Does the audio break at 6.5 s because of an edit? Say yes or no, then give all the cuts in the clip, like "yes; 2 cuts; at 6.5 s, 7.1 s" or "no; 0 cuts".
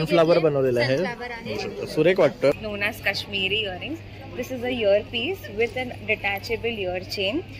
no; 1 cut; at 2.5 s